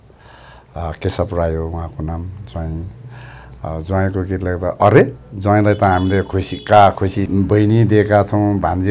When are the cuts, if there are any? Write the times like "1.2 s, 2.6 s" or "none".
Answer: 7.3 s